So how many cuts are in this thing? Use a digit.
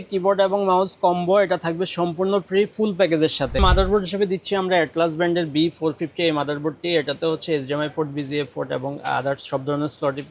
1